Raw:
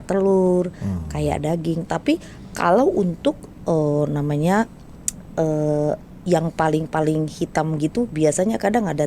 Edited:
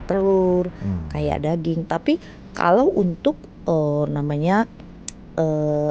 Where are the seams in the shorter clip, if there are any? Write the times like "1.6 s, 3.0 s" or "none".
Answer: none